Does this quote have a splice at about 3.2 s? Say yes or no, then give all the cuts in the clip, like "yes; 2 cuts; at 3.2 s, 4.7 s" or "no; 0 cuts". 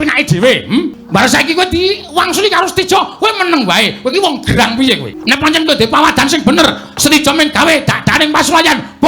no; 2 cuts; at 1.0 s, 5.1 s